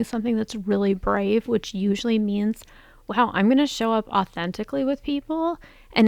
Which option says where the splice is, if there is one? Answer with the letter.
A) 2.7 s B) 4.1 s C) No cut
C